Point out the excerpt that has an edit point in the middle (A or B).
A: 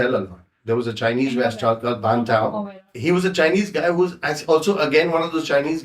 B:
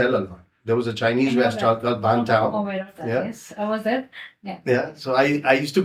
A